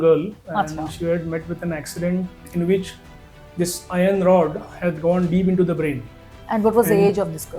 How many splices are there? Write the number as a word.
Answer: one